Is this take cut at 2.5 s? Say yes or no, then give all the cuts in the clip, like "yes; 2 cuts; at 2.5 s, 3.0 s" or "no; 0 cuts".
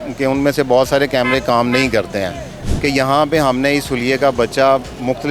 yes; 1 cut; at 2.5 s